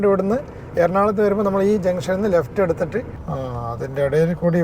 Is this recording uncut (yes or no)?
no